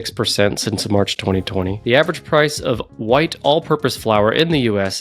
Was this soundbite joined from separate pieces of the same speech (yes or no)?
yes